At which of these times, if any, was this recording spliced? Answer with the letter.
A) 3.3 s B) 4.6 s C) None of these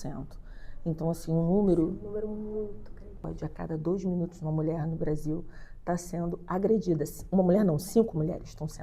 A